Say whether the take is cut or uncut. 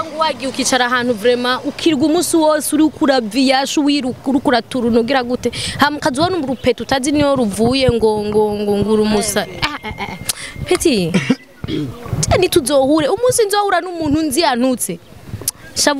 uncut